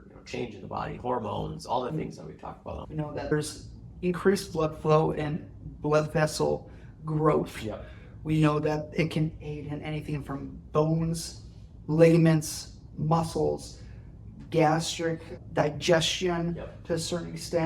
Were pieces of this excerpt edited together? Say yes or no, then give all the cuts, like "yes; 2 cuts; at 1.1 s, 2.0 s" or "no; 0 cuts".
yes; 1 cut; at 2.8 s